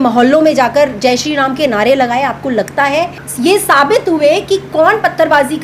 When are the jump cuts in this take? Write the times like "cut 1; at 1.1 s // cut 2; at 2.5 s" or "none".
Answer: cut 1; at 3.2 s